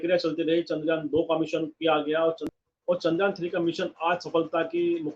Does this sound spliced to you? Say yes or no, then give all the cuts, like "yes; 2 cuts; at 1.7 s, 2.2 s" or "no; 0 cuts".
yes; 1 cut; at 2.5 s